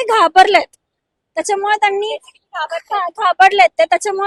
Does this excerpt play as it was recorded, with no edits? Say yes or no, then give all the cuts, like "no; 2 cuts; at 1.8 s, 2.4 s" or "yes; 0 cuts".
yes; 0 cuts